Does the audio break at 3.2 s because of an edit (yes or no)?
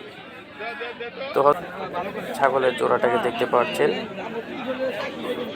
no